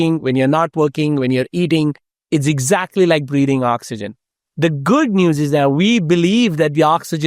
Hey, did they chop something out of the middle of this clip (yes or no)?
yes